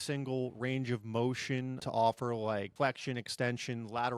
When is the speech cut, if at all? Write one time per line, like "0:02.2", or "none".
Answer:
0:01.8
0:02.7